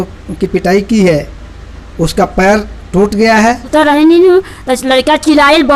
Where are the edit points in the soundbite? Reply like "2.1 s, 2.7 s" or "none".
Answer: 3.6 s